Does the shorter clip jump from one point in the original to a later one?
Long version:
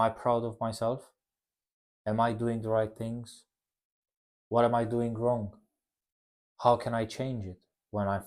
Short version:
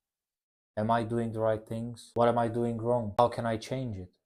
yes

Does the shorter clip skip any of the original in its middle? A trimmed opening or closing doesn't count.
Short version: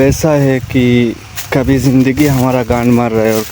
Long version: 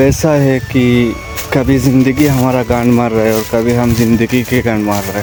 no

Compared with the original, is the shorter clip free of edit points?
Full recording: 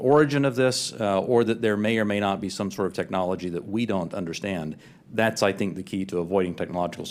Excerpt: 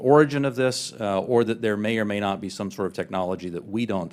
yes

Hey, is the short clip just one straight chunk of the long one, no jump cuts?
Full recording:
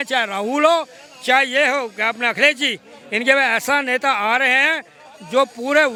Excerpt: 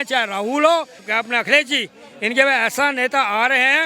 no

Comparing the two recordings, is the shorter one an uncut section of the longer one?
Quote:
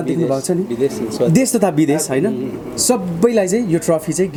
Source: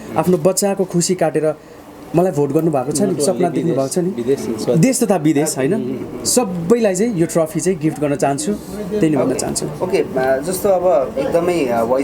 yes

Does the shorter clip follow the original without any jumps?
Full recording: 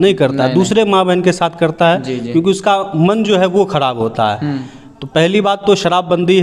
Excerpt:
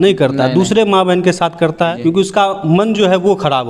no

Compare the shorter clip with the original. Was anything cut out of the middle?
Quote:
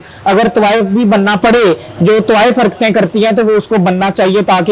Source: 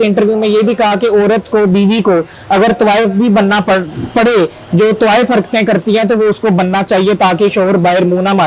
yes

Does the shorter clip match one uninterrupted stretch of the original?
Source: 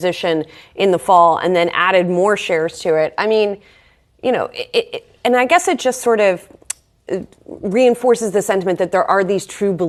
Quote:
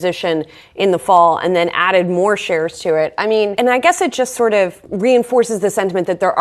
no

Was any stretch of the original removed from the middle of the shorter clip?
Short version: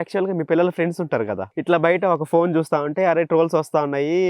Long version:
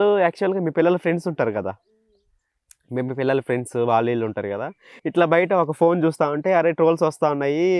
yes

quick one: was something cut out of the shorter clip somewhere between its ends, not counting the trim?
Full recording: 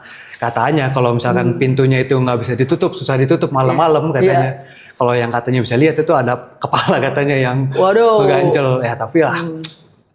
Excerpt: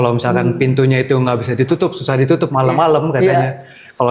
no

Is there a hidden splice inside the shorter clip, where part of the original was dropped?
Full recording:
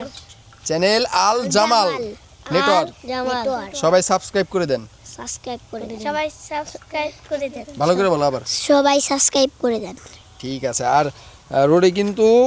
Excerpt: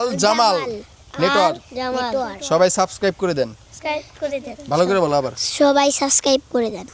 yes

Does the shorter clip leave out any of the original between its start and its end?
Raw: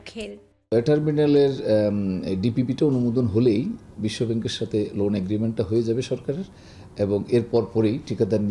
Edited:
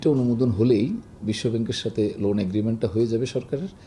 no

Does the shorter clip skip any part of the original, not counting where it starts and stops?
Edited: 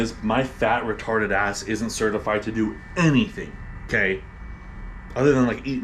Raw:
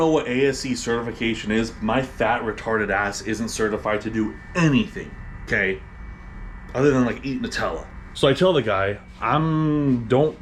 no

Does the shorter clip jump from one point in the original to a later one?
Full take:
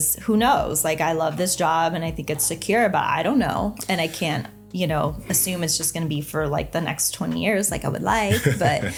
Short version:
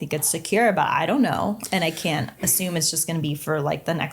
yes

